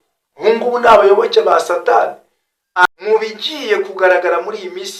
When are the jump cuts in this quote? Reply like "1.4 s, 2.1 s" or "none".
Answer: 2.8 s